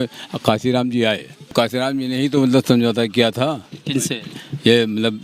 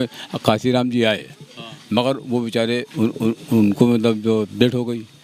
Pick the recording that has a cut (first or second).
first